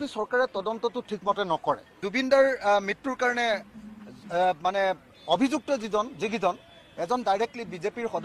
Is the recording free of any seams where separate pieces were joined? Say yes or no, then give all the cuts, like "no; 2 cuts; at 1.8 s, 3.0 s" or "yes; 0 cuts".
no; 1 cut; at 2.1 s